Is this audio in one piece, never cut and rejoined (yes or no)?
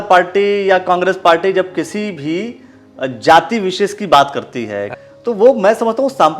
no